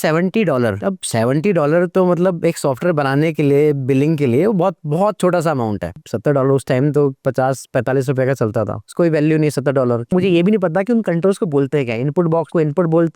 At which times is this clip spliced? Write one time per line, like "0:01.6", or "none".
0:06.0
0:10.1